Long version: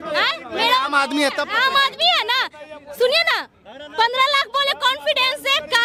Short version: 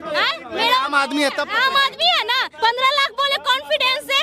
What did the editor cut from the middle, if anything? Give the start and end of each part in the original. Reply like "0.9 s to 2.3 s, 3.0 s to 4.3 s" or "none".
2.5 s to 3.8 s